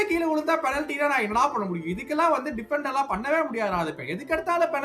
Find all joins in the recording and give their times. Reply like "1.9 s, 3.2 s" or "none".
none